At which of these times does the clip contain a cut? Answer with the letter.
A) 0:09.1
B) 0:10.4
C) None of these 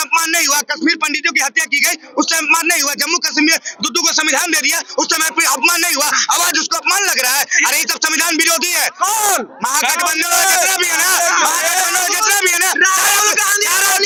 C